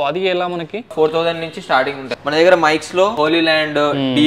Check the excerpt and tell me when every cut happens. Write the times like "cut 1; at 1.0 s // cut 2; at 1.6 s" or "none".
cut 1; at 0.9 s // cut 2; at 2.0 s // cut 3; at 3.2 s